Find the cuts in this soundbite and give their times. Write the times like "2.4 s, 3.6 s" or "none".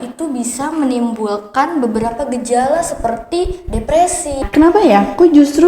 4.4 s